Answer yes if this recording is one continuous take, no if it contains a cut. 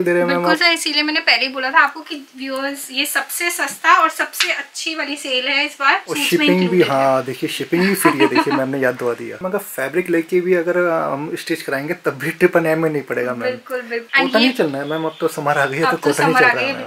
no